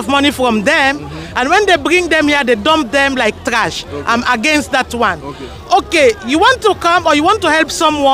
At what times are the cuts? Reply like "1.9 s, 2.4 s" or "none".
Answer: none